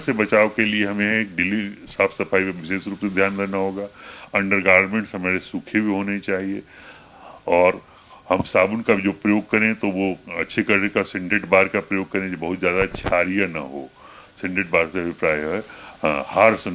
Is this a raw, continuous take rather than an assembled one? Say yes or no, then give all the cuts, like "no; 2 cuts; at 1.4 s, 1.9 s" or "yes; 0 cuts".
yes; 0 cuts